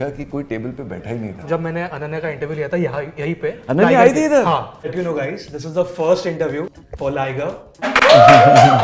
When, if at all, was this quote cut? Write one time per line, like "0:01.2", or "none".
0:01.4
0:04.8
0:07.9